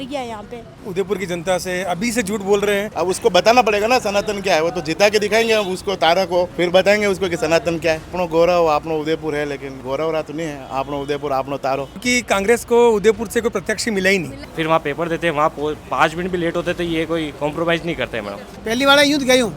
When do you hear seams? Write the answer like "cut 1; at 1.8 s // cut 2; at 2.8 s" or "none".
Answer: cut 1; at 0.8 s // cut 2; at 2.9 s // cut 3; at 8.1 s // cut 4; at 12.0 s // cut 5; at 14.4 s // cut 6; at 18.5 s